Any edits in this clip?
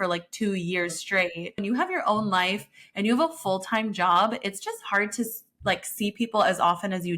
yes; 1 cut; at 1.6 s

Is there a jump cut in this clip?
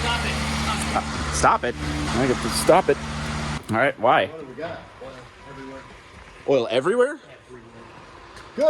yes; 2 cuts; at 2.1 s, 3.5 s

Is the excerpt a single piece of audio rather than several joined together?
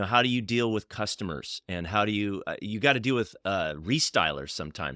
yes; 0 cuts

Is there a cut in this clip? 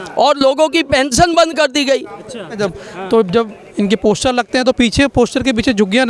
yes; 1 cut; at 2.6 s

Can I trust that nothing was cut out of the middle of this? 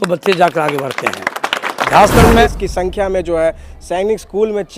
no; 1 cut; at 2.4 s

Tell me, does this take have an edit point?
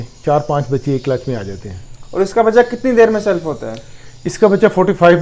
no; 0 cuts

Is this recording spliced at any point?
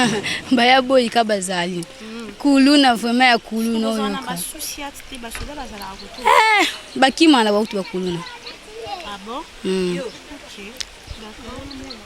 no; 0 cuts

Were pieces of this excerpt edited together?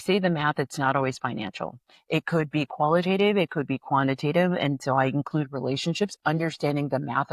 no; 0 cuts

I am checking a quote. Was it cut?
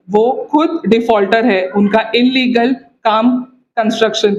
no; 0 cuts

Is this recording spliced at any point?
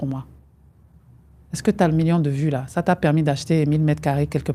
no; 0 cuts

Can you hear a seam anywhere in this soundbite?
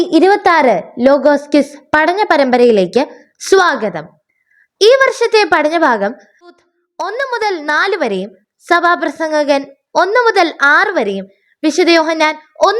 yes; 1 cut; at 6.6 s

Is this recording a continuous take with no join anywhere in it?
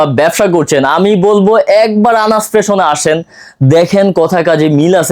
yes; 0 cuts

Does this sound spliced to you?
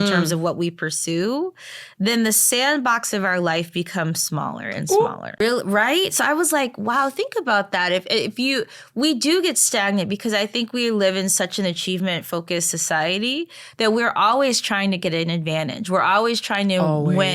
yes; 1 cut; at 5.4 s

